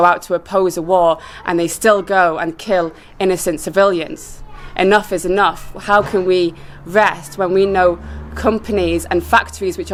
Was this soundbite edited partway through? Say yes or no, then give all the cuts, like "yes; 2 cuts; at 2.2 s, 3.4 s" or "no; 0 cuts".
no; 0 cuts